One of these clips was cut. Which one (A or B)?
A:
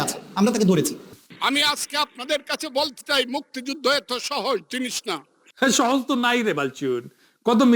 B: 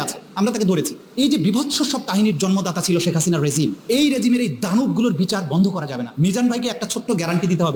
A